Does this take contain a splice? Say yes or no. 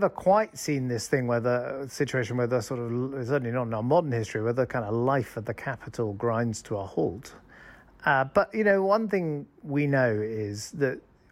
no